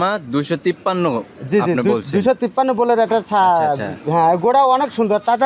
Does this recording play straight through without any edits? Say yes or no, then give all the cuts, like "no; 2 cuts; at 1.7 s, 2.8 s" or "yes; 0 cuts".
yes; 0 cuts